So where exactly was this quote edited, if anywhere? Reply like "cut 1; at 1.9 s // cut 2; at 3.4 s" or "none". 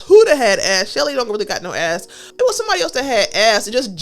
cut 1; at 2.3 s